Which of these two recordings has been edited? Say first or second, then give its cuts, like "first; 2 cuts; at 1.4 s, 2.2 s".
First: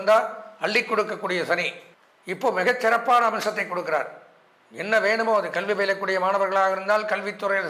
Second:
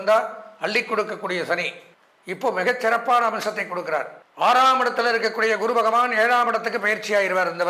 second; 1 cut; at 4.2 s